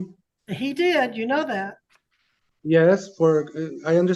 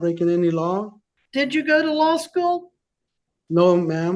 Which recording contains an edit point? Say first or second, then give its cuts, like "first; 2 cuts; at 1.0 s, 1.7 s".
second; 1 cut; at 1.1 s